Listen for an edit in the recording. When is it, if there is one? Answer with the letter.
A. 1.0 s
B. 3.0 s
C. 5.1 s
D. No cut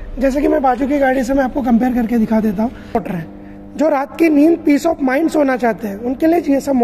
B